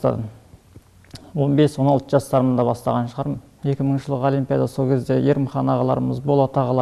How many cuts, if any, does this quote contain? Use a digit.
1